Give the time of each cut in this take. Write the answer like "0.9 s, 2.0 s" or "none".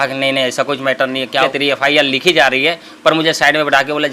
1.5 s